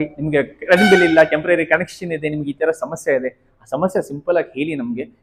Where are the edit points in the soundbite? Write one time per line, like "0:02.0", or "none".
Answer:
none